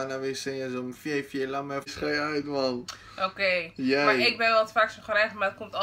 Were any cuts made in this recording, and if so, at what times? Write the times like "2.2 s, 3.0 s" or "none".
1.9 s